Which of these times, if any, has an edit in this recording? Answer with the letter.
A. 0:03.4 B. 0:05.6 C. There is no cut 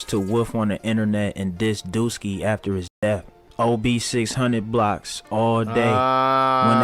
A